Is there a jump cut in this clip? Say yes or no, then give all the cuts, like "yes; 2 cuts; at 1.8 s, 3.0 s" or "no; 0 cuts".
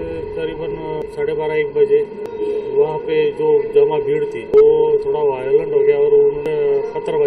yes; 4 cuts; at 1.0 s, 2.2 s, 4.5 s, 6.4 s